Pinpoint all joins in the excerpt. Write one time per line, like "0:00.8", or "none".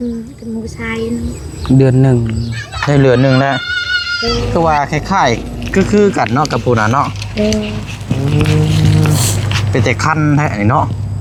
none

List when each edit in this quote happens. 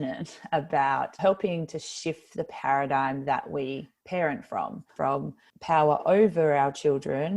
0:01.2
0:04.9

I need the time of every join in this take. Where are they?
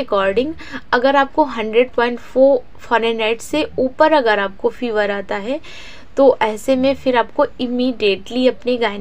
none

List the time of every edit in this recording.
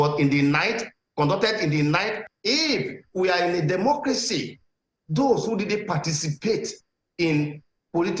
0:02.3

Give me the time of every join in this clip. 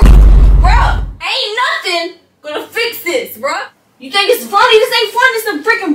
0:01.1
0:03.7

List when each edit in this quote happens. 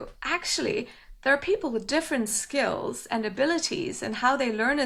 none

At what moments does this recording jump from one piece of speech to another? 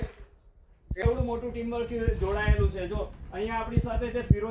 0:01.0

